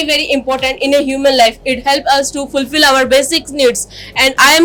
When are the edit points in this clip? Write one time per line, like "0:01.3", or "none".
none